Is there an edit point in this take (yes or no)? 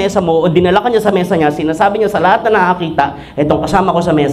no